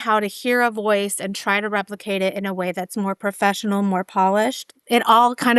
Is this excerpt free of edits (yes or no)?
yes